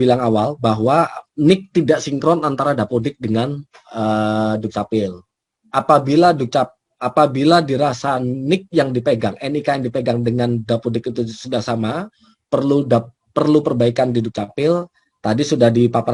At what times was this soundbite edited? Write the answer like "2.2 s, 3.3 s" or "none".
none